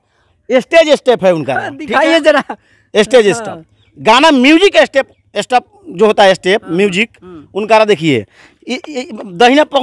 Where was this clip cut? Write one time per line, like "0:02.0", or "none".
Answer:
none